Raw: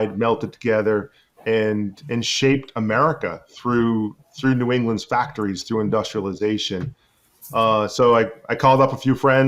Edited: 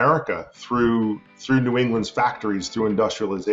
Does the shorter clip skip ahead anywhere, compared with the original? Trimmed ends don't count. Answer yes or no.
no